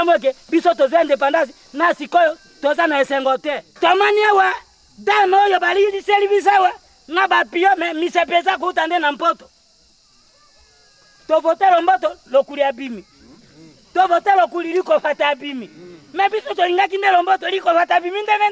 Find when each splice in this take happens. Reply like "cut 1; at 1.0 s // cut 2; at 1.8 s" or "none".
cut 1; at 3.7 s